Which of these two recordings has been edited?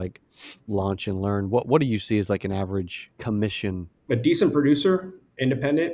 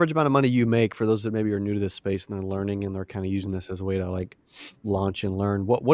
first; 2 cuts; at 3.0 s, 3.9 s

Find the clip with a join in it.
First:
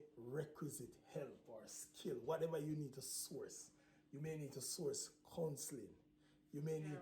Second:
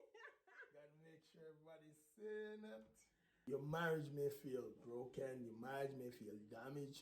second; 1 cut; at 3.4 s

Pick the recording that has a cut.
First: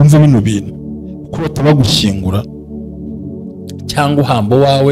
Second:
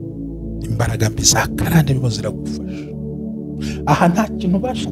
second; 2 cuts; at 2.0 s, 3.7 s

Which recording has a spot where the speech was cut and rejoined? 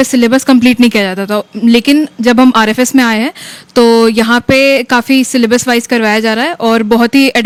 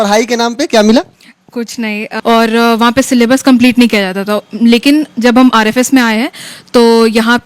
second; 1 cut; at 2.1 s

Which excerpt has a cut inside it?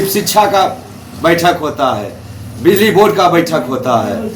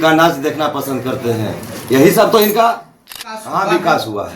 second; 1 cut; at 3.1 s

